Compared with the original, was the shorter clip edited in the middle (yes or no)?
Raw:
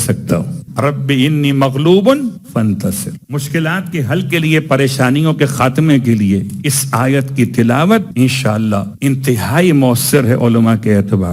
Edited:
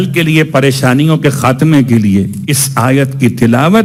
no